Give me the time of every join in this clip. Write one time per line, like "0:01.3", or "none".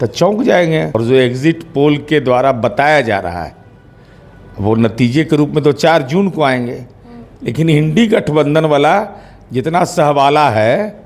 0:00.9